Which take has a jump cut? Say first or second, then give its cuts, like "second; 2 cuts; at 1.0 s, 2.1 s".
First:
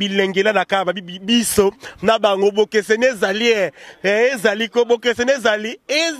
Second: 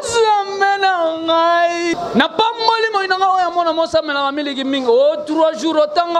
second; 1 cut; at 2.0 s